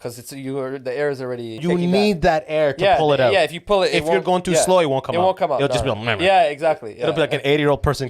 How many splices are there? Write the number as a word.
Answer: one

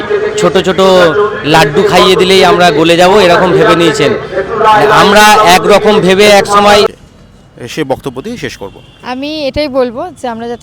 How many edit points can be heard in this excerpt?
one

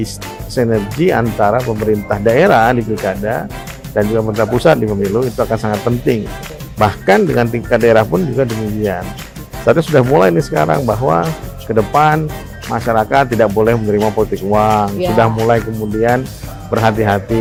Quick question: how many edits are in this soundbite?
zero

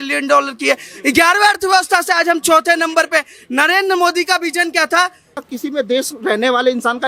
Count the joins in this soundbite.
one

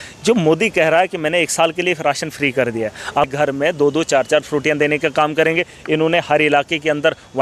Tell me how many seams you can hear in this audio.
one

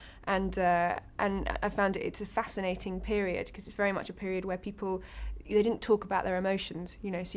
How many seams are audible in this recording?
zero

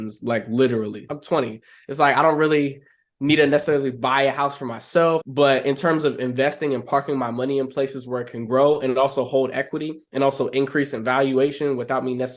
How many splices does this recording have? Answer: two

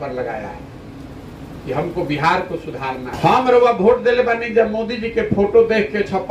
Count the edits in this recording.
one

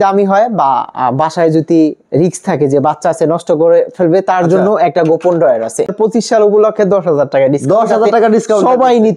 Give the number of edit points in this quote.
one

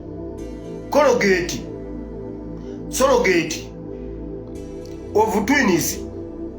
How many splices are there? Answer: four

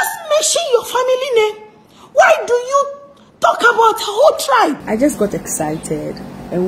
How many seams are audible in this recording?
one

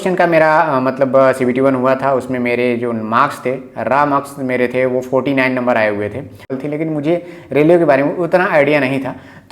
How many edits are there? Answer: one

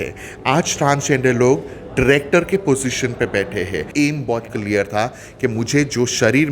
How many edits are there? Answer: one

